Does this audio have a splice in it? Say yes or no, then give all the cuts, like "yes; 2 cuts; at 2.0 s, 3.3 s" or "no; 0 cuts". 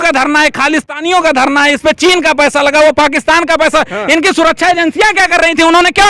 no; 0 cuts